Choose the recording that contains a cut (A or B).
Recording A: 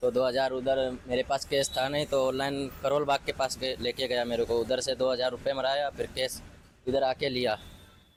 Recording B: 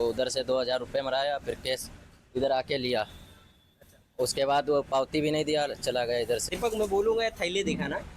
B